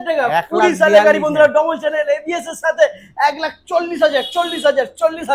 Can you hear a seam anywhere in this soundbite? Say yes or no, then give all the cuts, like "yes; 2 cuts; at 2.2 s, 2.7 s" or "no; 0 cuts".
no; 0 cuts